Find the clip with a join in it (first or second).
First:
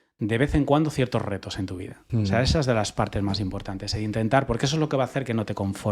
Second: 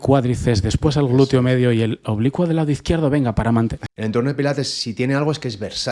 second